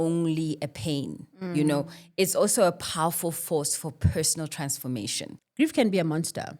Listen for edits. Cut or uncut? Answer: cut